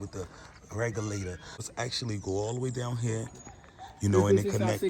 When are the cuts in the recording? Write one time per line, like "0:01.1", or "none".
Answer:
0:01.7